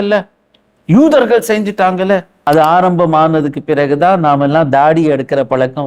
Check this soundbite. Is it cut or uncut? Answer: cut